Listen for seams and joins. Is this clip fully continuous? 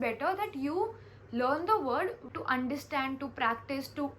no; 1 cut; at 2.3 s

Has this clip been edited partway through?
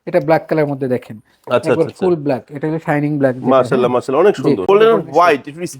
yes; 1 cut; at 4.6 s

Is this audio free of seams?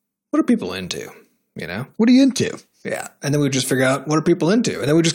yes; 0 cuts

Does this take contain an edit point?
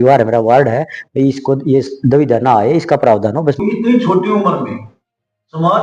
no; 0 cuts

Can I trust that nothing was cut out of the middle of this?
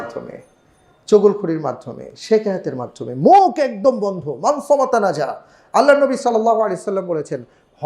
yes; 0 cuts

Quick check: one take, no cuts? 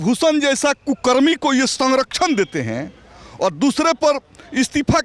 yes; 0 cuts

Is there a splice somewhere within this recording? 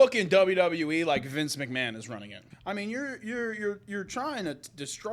yes; 1 cut; at 2.5 s

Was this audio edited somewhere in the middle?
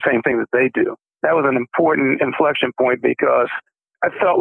yes; 1 cut; at 1.1 s

